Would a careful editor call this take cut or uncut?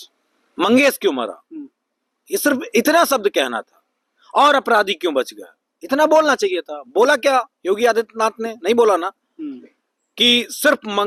uncut